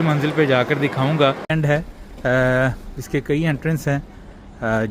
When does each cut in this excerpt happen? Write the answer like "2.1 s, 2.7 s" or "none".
1.5 s